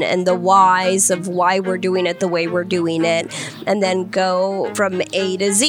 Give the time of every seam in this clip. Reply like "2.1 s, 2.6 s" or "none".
4.7 s